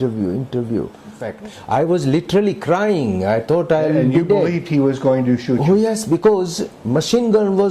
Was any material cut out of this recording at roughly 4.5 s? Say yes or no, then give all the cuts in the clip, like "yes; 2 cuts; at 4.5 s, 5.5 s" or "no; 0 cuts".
no; 1 cut; at 1.3 s